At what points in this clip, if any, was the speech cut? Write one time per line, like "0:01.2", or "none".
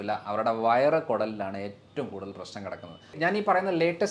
0:03.2